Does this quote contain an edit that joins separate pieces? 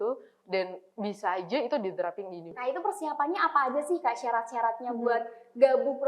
yes; 1 cut; at 2.5 s

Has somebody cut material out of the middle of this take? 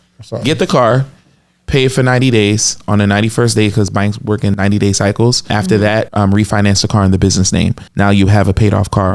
yes; 3 cuts; at 4.5 s, 5.9 s, 7.8 s

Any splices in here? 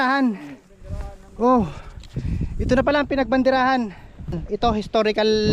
yes; 1 cut; at 4.3 s

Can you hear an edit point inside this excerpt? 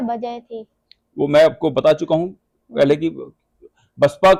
no; 0 cuts

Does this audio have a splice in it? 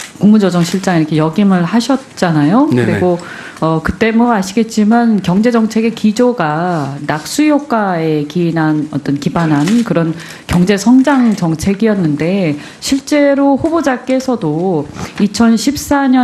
no; 0 cuts

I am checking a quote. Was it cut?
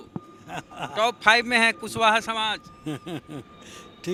no; 0 cuts

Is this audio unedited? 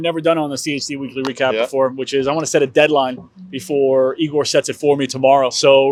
yes; 0 cuts

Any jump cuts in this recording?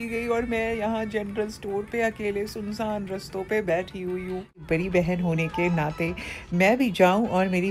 yes; 1 cut; at 4.6 s

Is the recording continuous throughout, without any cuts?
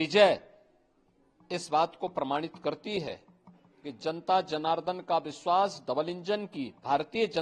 yes; 0 cuts

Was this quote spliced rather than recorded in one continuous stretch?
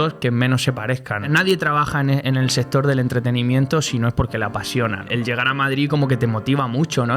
yes; 2 cuts; at 1.2 s, 5.0 s

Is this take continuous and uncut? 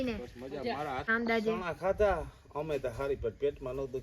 no; 1 cut; at 1.1 s

